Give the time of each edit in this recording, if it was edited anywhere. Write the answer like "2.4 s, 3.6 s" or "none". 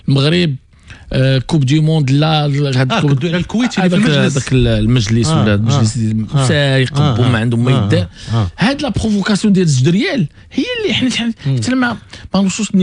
none